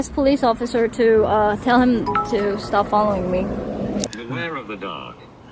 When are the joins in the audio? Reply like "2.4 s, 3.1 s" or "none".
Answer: 4.1 s